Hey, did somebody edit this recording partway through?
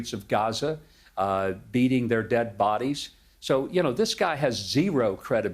no; 0 cuts

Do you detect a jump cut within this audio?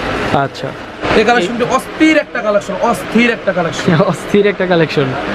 yes; 1 cut; at 1.0 s

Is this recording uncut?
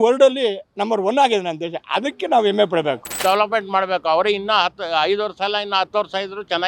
no; 1 cut; at 3.1 s

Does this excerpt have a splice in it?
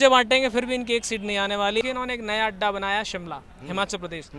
yes; 1 cut; at 1.8 s

